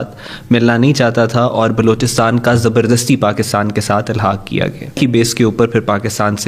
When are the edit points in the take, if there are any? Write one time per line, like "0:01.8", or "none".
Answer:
0:05.0